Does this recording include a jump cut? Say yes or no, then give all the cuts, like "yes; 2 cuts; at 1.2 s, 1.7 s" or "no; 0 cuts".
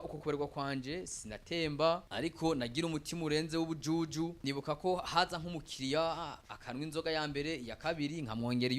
yes; 2 cuts; at 2.1 s, 4.4 s